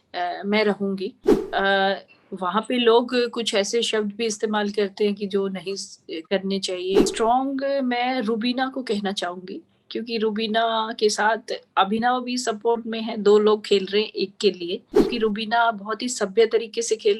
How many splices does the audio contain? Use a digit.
3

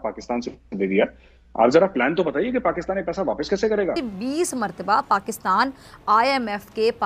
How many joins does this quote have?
1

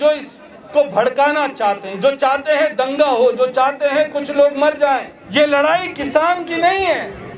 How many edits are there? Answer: 1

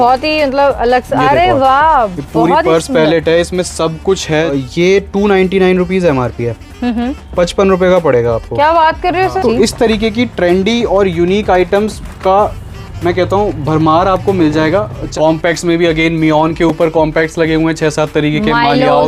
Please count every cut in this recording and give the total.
3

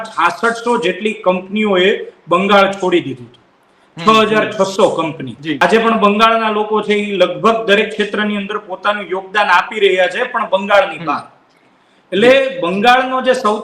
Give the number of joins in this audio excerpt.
1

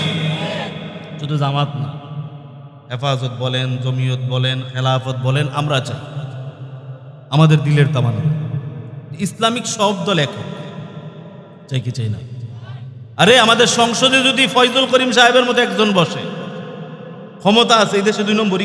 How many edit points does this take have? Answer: 0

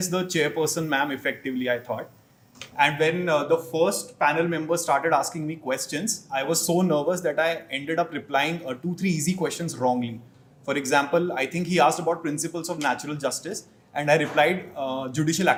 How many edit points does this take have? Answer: 0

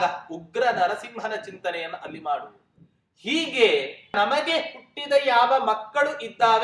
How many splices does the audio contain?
1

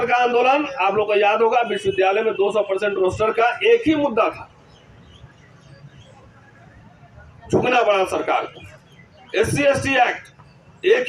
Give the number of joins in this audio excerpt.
0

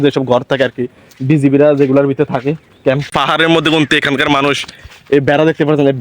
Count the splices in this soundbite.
1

